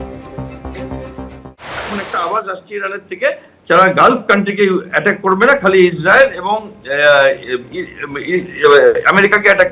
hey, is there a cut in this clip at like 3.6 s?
no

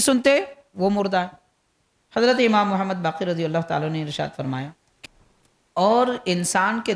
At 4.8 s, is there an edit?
yes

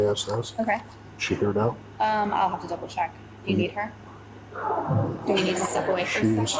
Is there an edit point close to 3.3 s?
no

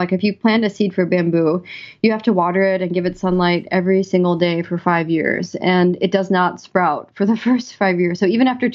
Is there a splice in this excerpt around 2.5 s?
no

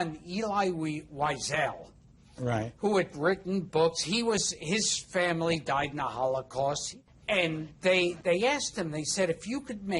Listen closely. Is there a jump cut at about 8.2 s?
yes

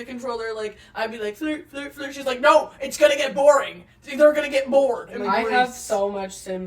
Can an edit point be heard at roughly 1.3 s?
no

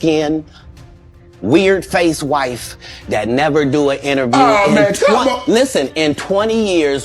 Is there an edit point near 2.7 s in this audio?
no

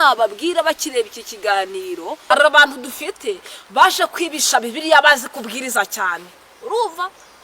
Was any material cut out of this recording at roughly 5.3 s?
no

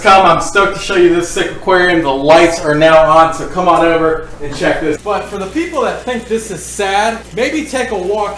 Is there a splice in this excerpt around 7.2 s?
yes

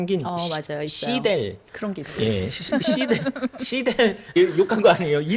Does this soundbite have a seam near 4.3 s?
yes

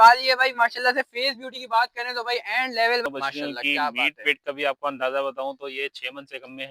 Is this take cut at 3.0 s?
yes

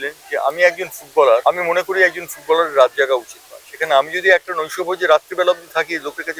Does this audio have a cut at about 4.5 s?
no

